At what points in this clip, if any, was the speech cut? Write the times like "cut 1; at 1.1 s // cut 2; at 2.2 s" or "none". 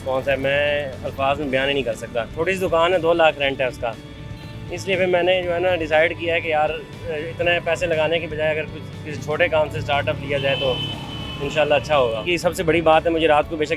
cut 1; at 2.3 s // cut 2; at 12.3 s